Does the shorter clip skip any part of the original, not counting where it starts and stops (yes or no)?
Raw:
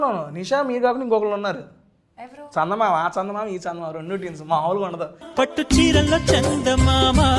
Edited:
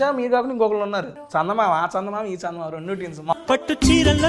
yes